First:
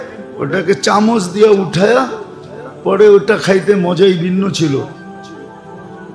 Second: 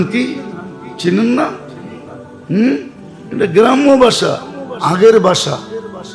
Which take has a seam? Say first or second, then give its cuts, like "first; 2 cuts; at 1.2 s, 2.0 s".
first; 1 cut; at 5.0 s